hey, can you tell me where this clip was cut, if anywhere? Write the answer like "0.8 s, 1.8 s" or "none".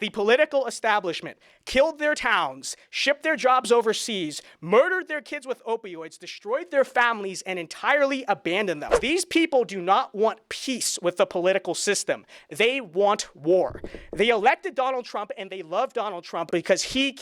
9.0 s, 16.5 s